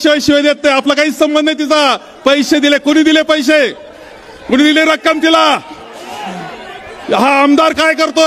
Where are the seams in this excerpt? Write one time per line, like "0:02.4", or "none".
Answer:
none